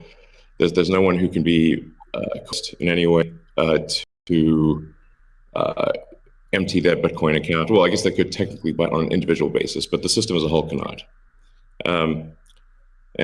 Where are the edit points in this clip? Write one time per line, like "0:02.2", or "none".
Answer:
0:02.5

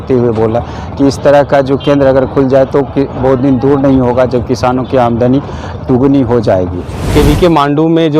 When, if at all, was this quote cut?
0:07.1

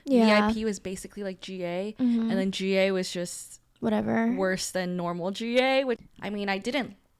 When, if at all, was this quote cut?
0:06.0

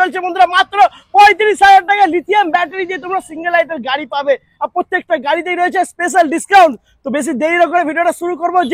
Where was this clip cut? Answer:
none

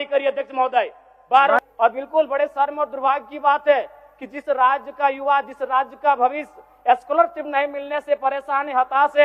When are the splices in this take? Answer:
0:01.6

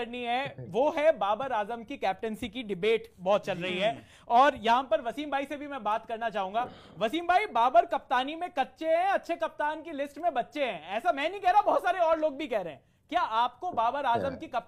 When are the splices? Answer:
none

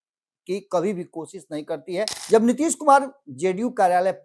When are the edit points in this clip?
0:02.2

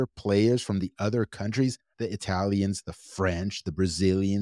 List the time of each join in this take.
0:01.9

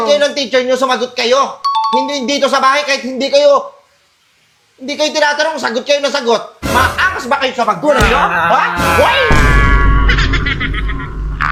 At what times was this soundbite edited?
none

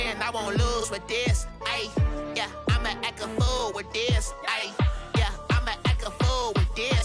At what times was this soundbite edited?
none

